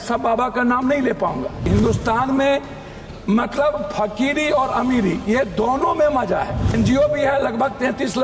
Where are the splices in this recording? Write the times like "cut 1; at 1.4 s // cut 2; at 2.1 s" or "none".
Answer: cut 1; at 1.7 s // cut 2; at 6.7 s

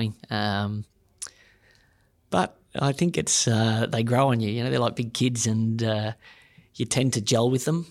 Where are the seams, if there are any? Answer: none

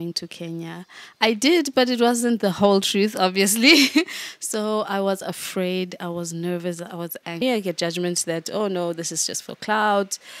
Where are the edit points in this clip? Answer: cut 1; at 7.4 s

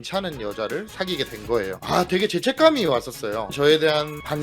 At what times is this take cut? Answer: cut 1; at 3.5 s

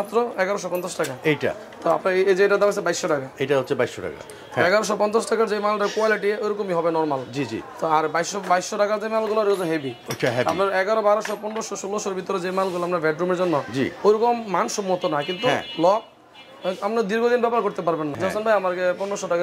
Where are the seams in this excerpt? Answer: cut 1; at 18.2 s

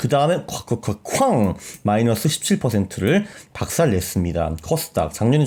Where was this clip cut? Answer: none

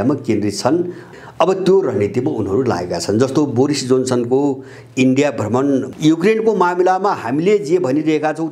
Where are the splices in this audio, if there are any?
cut 1; at 1.1 s // cut 2; at 5.9 s

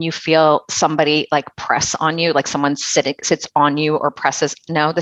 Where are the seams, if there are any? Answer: none

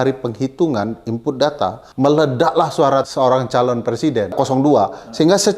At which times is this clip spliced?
cut 1; at 1.8 s // cut 2; at 3.1 s // cut 3; at 4.3 s

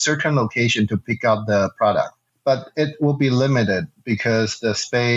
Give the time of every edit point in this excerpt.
cut 1; at 2.2 s

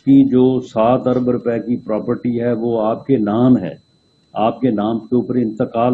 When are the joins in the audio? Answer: none

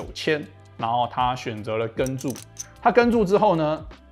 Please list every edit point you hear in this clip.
none

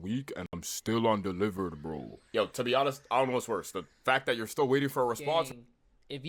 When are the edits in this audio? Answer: none

